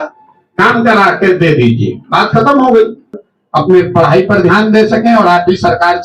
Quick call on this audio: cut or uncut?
cut